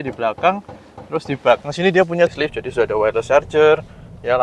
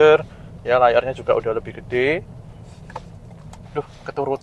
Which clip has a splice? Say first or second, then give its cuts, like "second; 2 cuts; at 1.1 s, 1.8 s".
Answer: first; 1 cut; at 2.3 s